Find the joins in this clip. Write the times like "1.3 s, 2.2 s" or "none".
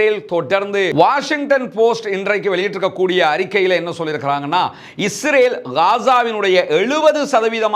0.9 s

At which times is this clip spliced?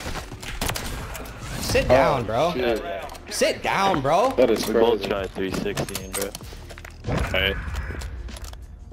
none

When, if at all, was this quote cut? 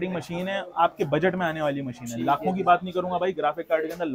none

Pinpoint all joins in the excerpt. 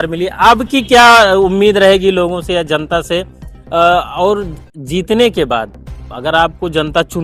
none

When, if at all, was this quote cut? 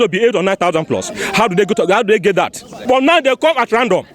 2.8 s

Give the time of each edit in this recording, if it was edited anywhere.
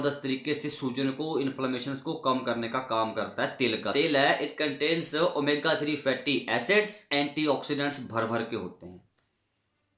3.9 s, 7.1 s

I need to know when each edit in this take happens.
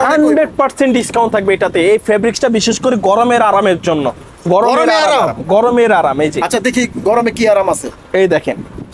none

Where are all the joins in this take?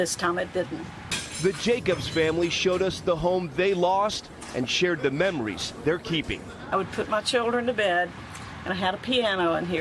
2.7 s

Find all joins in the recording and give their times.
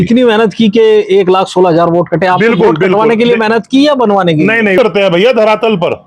4.8 s

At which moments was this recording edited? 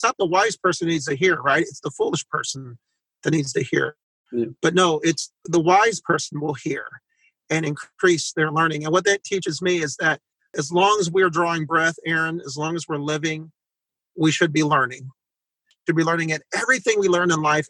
none

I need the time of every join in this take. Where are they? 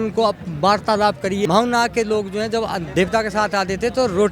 1.5 s

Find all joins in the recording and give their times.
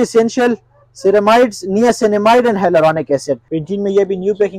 3.4 s

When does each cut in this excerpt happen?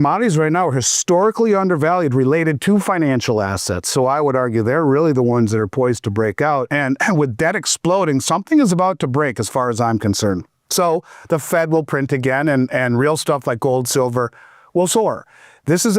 6.7 s

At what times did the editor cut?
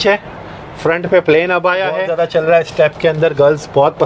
2.1 s

